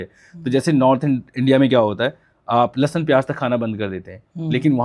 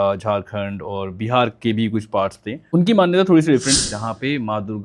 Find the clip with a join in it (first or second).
second